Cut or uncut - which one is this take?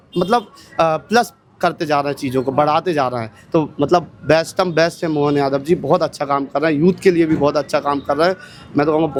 uncut